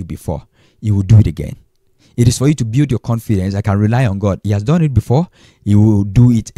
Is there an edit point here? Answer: no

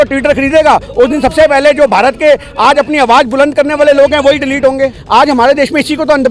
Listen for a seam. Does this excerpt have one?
yes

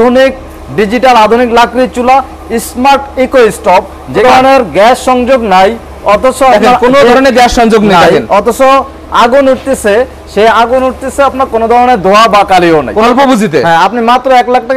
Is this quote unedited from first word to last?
no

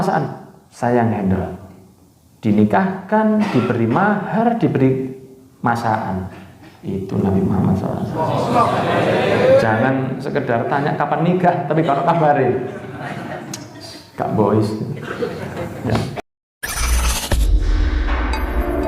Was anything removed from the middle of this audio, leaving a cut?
yes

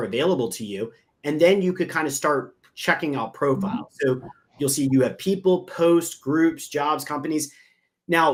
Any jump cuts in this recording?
no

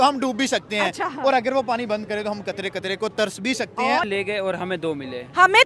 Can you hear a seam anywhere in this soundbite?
yes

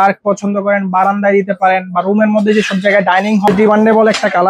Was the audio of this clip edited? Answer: yes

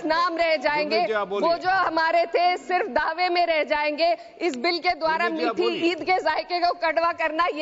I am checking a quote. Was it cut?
no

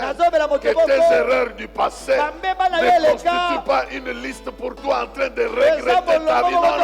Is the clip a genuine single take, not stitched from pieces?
yes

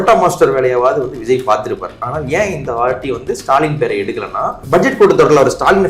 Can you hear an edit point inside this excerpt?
yes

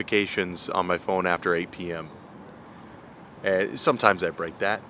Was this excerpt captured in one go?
yes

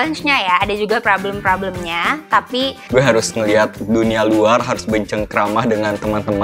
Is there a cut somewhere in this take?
yes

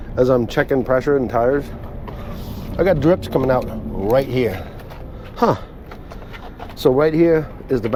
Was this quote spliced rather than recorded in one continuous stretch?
no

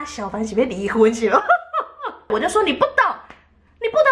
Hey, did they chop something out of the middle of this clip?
yes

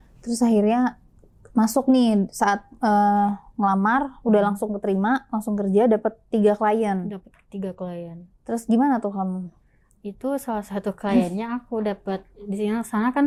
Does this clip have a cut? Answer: no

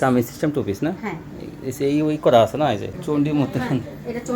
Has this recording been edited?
yes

